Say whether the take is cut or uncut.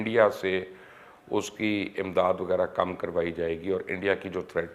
uncut